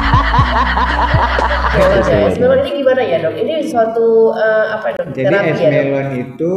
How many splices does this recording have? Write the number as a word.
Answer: one